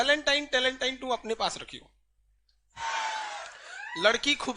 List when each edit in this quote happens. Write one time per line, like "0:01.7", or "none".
0:02.8